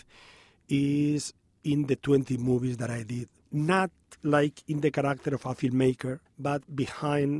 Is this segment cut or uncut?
cut